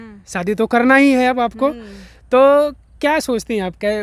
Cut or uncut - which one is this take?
uncut